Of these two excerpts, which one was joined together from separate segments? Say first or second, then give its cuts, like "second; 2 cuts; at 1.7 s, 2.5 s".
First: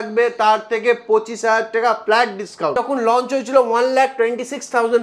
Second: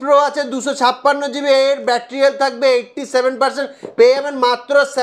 first; 1 cut; at 2.7 s